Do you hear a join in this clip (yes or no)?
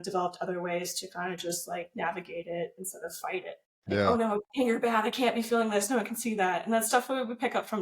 yes